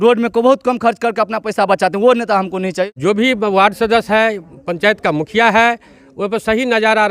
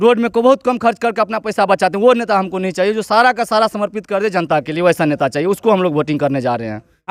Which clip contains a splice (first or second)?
first